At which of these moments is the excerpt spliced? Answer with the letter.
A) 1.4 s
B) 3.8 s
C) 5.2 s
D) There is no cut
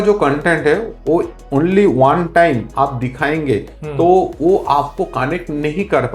A